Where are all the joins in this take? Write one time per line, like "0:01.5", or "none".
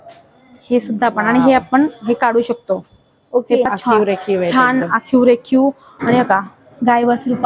0:03.6